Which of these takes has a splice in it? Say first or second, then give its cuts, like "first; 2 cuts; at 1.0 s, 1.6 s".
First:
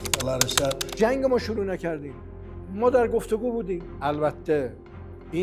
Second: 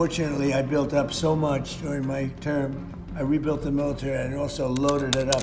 first; 2 cuts; at 0.9 s, 3.8 s